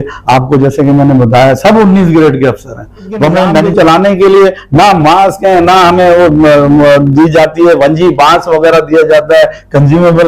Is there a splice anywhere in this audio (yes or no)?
yes